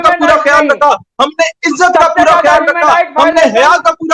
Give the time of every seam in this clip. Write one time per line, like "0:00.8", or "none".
none